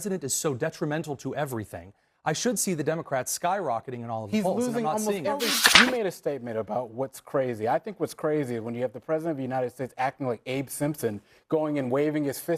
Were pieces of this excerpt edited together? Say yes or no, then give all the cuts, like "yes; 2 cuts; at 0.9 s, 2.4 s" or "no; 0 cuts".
yes; 1 cut; at 5.6 s